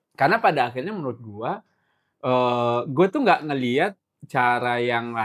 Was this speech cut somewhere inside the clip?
no; 0 cuts

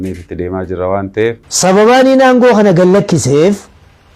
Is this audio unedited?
no; 1 cut; at 1.5 s

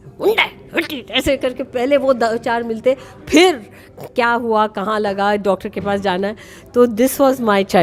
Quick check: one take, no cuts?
yes; 0 cuts

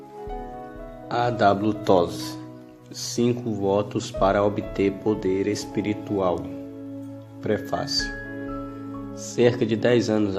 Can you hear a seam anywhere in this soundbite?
yes; 1 cut; at 1.1 s

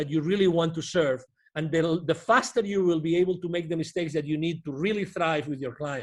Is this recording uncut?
yes; 0 cuts

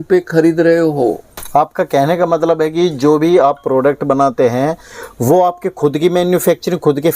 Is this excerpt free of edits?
no; 1 cut; at 1.3 s

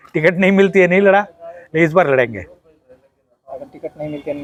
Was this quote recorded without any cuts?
yes; 0 cuts

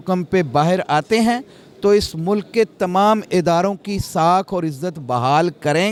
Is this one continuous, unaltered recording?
yes; 0 cuts

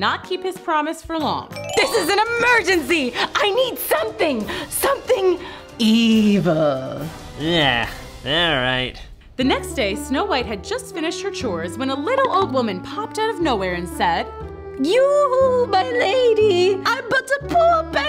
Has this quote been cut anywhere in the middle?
yes; 1 cut; at 1.6 s

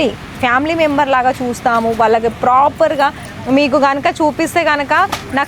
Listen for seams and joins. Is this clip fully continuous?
no; 1 cut; at 3.3 s

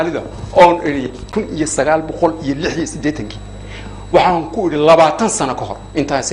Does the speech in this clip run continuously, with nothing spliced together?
no; 1 cut; at 1.2 s

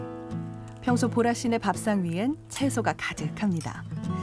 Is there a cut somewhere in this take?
no; 0 cuts

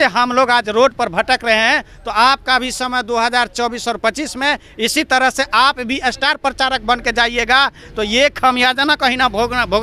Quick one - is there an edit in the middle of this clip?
no; 0 cuts

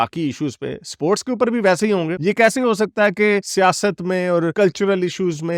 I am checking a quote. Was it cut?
no; 0 cuts

